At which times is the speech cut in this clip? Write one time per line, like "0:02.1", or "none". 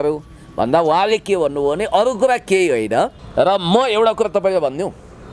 0:03.1

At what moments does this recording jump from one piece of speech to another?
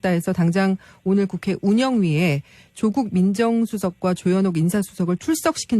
0:02.4

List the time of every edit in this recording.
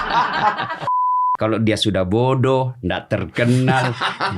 0:01.0

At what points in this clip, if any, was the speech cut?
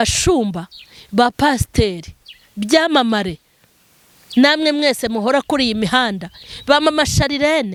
none

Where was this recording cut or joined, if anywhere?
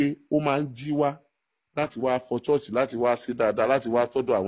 none

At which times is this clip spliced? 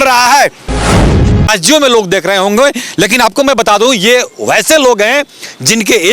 0:01.1

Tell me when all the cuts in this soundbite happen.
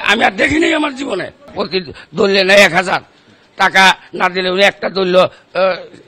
0:01.5

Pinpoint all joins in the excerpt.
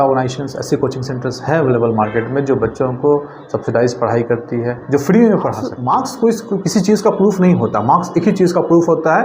0:05.7

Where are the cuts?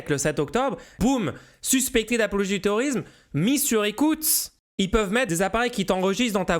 0:01.0
0:05.3

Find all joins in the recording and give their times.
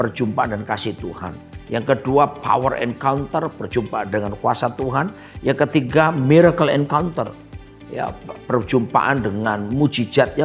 none

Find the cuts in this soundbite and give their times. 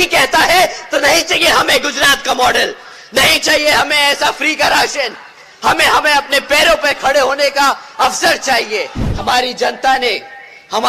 0:09.0

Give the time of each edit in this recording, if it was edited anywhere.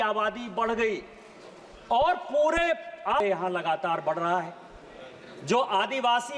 0:03.2

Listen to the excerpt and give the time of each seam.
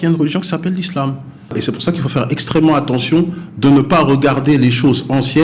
0:01.6

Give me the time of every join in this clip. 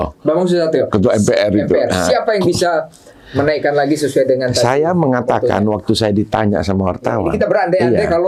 none

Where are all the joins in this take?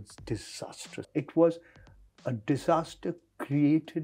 0:01.1

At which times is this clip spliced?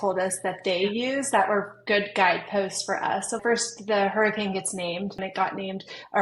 0:03.4
0:05.2

